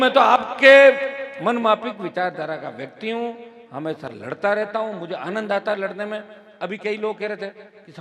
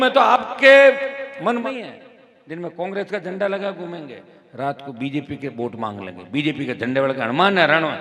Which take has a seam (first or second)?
second